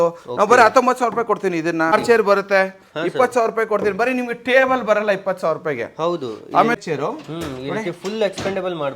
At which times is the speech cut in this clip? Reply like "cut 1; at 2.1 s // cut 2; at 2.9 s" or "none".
cut 1; at 1.9 s // cut 2; at 6.7 s